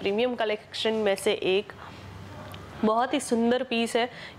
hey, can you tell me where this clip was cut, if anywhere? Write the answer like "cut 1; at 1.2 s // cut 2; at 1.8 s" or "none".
none

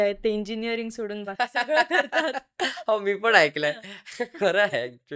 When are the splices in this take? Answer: none

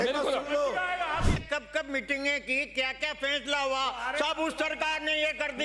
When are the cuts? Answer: cut 1; at 1.3 s

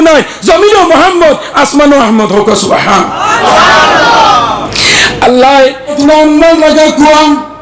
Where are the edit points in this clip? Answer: cut 1; at 6.0 s

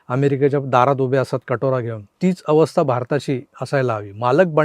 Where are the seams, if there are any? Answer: cut 1; at 2.0 s // cut 2; at 3.5 s

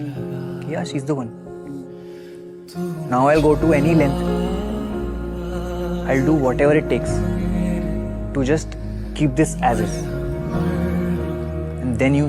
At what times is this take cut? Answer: cut 1; at 1.7 s

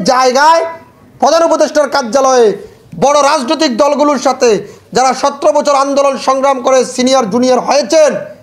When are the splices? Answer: none

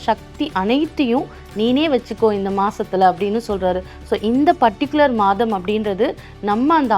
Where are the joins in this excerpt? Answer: none

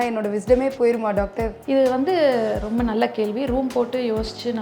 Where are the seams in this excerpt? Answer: cut 1; at 1.5 s

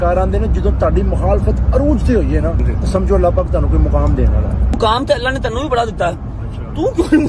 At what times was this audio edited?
cut 1; at 2.7 s // cut 2; at 4.8 s

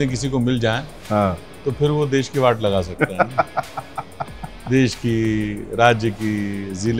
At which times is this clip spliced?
none

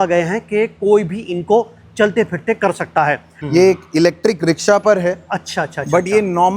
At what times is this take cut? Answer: cut 1; at 3.3 s

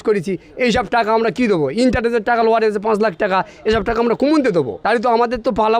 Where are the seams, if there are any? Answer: cut 1; at 4.8 s

